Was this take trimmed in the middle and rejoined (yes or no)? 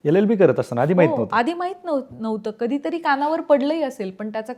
no